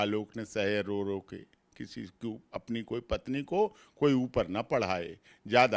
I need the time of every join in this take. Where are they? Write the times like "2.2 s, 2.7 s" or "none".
none

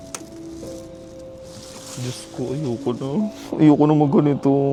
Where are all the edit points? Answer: none

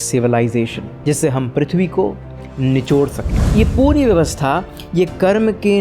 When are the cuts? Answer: 3.4 s

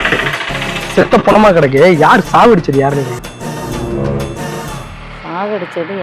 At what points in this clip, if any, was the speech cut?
none

